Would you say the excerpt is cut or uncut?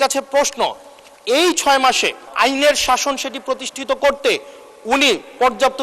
cut